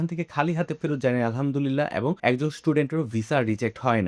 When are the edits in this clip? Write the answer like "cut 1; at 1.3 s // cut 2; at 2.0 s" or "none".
none